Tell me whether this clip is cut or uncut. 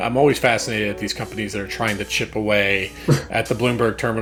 uncut